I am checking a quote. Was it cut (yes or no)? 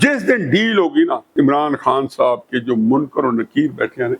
yes